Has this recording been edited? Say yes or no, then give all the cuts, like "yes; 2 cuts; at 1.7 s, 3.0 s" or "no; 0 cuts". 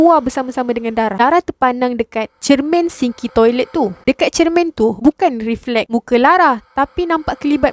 yes; 2 cuts; at 1.1 s, 4.0 s